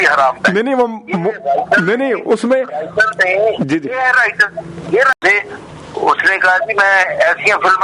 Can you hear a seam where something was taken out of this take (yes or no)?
yes